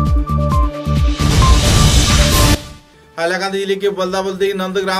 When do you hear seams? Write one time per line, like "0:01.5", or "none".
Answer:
0:02.6